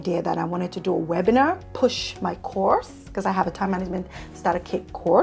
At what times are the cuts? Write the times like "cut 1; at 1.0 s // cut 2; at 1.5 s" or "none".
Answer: cut 1; at 1.7 s